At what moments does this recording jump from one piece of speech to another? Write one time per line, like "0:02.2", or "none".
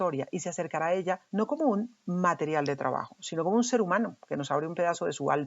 0:01.2